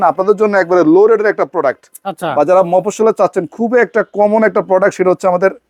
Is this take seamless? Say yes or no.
yes